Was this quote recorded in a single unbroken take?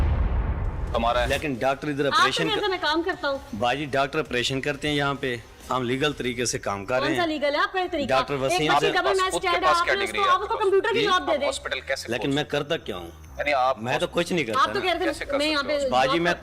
yes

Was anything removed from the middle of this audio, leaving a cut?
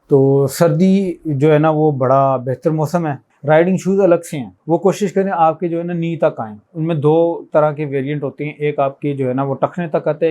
yes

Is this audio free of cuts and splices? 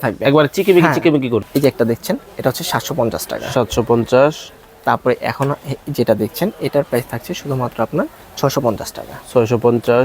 no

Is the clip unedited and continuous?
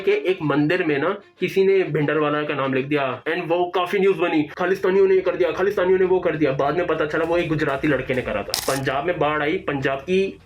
no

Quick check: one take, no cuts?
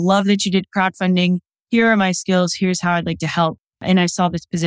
no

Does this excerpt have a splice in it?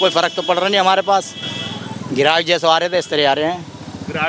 no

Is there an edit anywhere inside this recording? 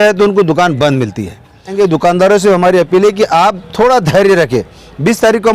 yes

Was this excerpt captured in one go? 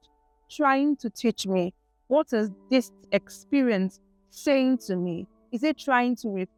yes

